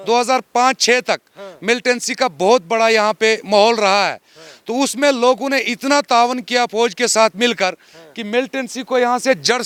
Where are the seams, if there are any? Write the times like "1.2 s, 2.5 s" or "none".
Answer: none